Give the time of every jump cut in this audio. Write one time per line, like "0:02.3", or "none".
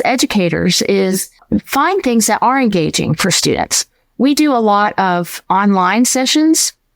0:01.3